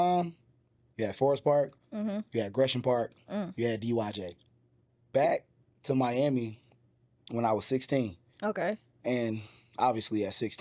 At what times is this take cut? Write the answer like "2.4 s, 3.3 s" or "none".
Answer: 5.0 s

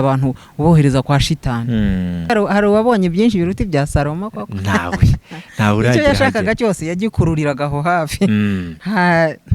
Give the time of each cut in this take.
2.3 s

